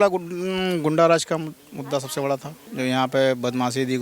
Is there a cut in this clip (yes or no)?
yes